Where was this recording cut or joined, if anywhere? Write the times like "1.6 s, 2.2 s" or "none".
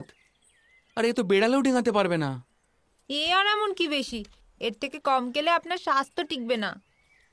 none